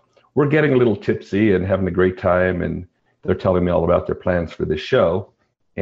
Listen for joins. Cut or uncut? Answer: uncut